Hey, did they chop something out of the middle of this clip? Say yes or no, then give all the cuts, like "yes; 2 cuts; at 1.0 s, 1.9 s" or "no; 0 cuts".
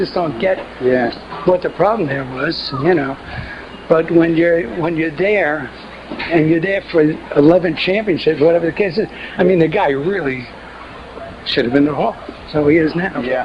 yes; 1 cut; at 10.9 s